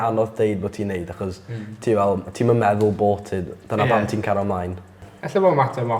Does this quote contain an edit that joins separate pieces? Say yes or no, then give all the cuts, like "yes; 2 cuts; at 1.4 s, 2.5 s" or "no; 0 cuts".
no; 0 cuts